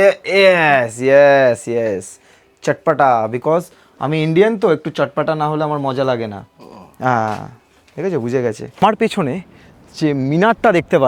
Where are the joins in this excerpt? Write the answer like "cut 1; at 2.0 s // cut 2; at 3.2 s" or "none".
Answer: cut 1; at 8.7 s